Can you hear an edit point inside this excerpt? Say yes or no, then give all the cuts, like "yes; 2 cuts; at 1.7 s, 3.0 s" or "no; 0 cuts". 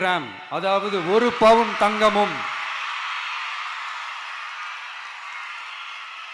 no; 0 cuts